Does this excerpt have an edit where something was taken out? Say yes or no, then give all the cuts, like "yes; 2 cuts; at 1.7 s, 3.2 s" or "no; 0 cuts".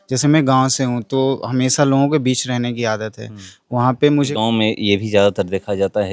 yes; 1 cut; at 4.3 s